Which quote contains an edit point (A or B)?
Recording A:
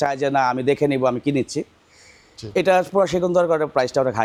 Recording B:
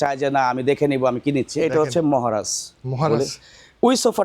B